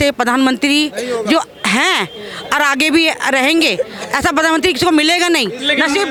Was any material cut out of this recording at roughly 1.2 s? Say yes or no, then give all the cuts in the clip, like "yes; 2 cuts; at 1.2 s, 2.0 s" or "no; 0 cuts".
no; 0 cuts